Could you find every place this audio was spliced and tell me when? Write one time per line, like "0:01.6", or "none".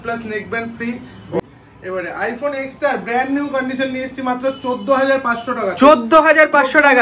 0:01.4